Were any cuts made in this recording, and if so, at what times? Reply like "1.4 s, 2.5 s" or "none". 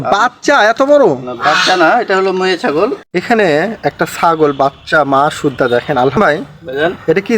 3.0 s, 6.2 s